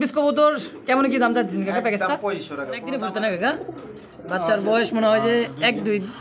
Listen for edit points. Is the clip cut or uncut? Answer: cut